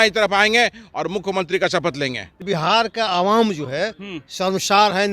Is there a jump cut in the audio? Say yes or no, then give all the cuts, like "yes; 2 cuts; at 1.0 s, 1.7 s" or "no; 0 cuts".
yes; 1 cut; at 2.4 s